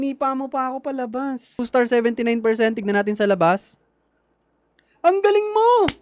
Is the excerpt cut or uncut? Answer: cut